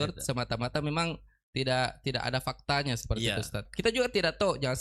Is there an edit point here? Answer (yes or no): yes